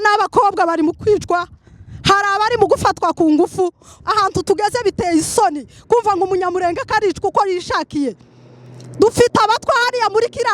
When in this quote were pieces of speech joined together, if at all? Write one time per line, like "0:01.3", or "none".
0:03.9